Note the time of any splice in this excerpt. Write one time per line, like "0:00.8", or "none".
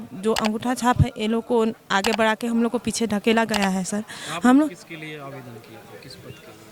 none